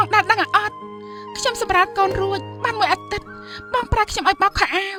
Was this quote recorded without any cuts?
yes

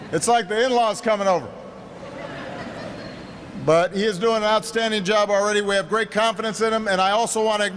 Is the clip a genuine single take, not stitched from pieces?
yes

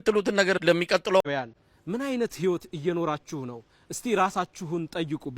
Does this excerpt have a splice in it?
yes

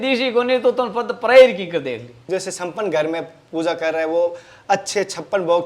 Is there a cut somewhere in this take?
yes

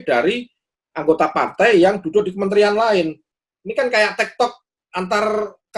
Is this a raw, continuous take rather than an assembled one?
yes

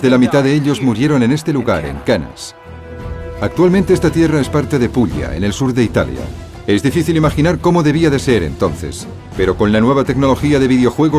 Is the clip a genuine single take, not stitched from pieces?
yes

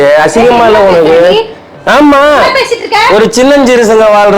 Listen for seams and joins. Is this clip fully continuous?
yes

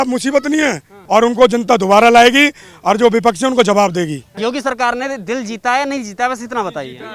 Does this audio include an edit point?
yes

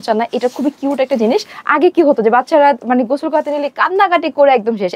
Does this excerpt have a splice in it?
yes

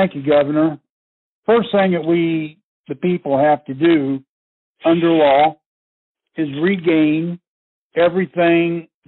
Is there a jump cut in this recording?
no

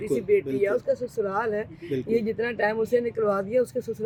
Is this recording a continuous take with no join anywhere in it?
yes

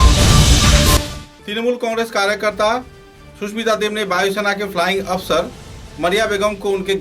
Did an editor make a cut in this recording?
no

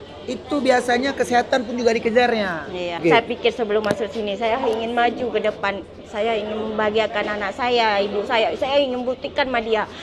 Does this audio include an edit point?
yes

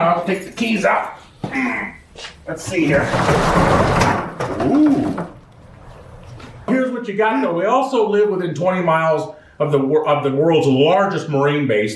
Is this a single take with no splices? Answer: no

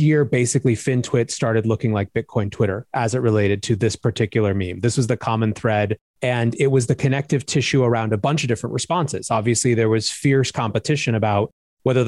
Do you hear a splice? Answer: yes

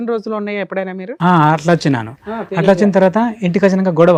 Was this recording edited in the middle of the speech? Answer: no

